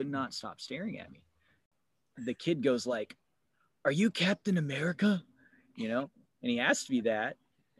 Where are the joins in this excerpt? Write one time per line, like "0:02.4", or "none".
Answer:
0:01.7